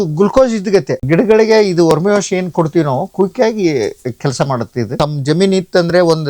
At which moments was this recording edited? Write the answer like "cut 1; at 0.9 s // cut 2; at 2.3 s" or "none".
cut 1; at 1.0 s // cut 2; at 4.9 s